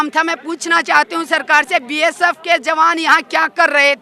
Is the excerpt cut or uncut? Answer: uncut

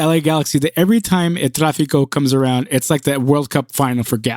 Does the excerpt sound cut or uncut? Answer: uncut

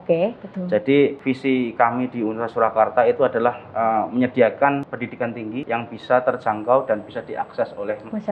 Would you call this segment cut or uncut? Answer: cut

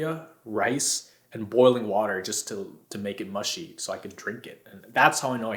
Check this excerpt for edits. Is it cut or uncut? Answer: uncut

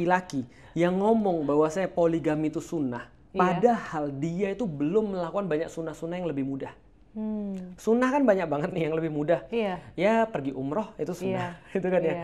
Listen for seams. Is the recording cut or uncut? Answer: uncut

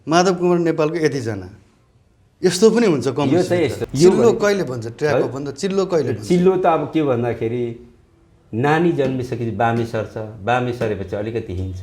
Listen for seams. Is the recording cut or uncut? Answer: cut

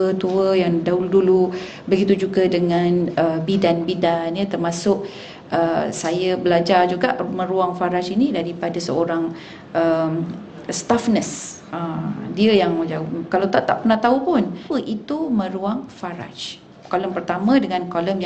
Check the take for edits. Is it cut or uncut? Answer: cut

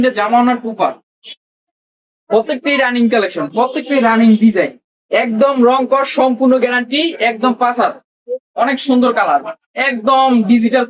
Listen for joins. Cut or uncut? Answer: uncut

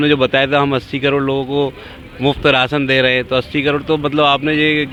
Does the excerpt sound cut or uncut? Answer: uncut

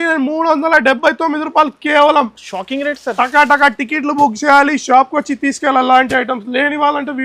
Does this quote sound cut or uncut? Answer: uncut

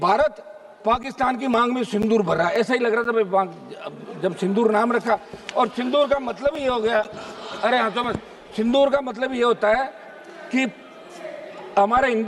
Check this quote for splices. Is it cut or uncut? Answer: uncut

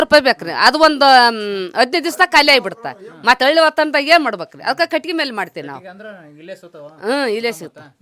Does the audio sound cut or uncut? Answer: uncut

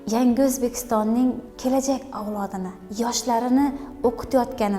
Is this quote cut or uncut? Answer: cut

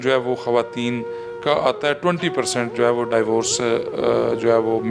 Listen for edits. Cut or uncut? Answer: uncut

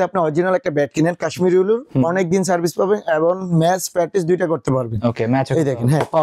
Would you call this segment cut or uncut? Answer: uncut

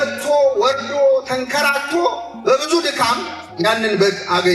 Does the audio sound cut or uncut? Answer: uncut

